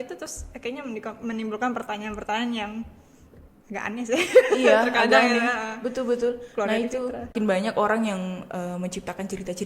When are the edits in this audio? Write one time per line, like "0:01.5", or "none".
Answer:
0:07.3